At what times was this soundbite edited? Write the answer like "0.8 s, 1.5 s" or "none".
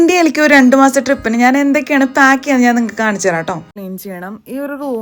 3.7 s